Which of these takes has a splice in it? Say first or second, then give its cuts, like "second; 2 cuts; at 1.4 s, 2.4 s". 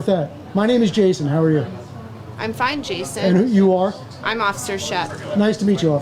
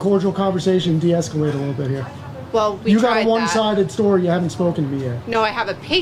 second; 1 cut; at 3.4 s